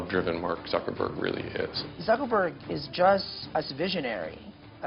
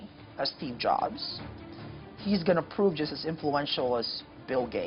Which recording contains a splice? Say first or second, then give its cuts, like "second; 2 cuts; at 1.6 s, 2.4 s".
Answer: first; 2 cuts; at 1.8 s, 3.4 s